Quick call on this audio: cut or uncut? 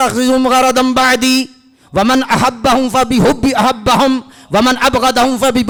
uncut